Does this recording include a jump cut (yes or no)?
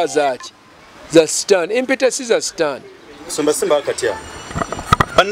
no